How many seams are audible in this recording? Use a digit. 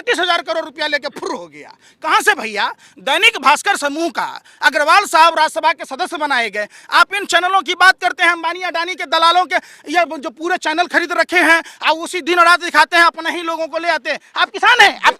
0